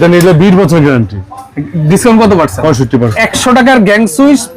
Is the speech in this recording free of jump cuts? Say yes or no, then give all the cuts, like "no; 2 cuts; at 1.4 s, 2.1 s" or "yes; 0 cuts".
no; 1 cut; at 3.2 s